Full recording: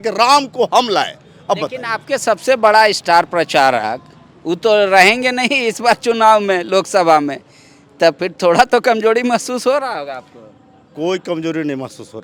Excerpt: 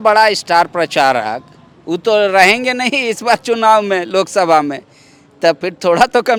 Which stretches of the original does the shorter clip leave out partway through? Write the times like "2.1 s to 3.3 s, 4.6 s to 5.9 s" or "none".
none